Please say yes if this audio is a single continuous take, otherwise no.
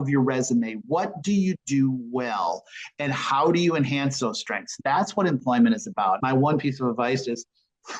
no